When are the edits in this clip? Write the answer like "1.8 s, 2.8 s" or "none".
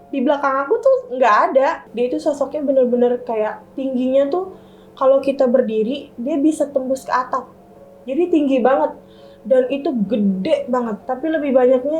1.8 s, 11.0 s